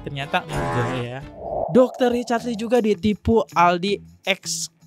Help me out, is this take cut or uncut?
uncut